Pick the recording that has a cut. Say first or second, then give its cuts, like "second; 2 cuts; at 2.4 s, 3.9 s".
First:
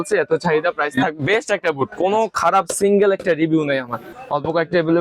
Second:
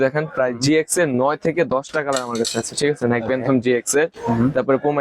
first; 1 cut; at 4.1 s